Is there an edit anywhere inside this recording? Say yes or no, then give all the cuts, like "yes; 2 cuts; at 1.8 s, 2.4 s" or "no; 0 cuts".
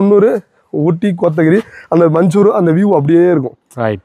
no; 0 cuts